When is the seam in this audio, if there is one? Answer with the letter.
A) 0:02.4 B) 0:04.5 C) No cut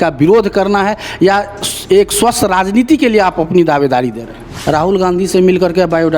B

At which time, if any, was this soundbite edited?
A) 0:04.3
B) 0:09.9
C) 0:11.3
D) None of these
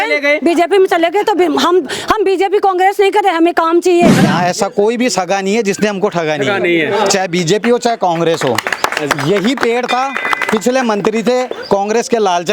A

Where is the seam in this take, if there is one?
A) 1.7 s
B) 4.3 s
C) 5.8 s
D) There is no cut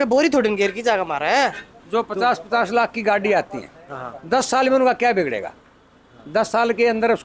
A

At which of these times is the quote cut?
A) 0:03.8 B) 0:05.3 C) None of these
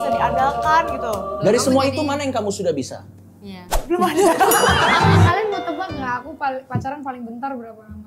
B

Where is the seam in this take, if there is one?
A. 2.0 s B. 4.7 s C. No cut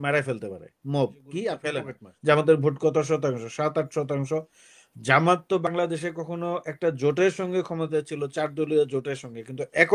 A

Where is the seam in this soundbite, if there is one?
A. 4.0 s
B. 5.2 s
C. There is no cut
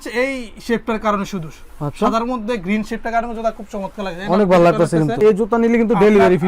B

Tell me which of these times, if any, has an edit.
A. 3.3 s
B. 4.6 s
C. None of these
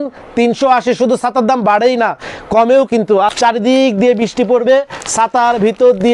A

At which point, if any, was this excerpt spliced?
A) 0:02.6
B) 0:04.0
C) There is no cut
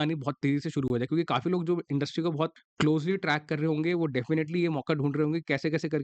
A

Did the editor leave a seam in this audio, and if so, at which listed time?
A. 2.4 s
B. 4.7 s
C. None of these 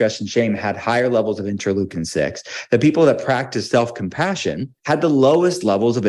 B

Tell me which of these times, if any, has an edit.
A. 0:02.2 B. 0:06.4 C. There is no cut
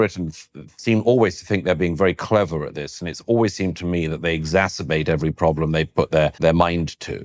B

